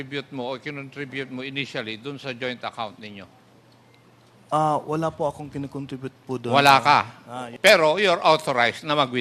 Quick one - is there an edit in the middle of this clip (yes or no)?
yes